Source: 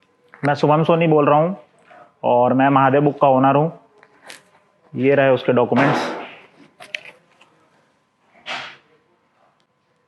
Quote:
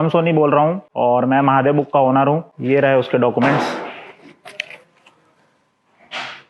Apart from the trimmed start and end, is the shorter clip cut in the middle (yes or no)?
yes